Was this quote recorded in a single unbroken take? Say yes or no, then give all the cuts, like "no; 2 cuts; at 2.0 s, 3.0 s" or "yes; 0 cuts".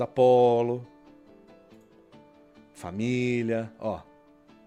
yes; 0 cuts